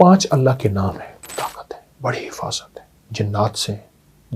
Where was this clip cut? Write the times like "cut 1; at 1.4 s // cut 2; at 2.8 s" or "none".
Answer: cut 1; at 1.3 s